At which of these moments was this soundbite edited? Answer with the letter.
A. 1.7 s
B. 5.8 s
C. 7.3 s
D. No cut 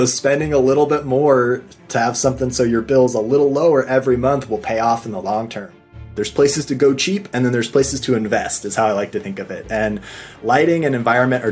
B